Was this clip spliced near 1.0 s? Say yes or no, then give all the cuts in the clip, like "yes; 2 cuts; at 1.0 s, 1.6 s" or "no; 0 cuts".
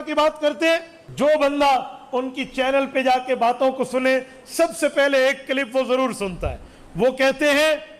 yes; 1 cut; at 1.0 s